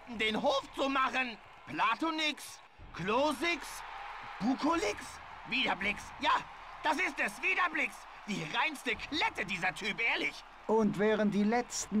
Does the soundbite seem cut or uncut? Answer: uncut